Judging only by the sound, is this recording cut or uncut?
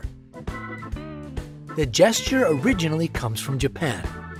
uncut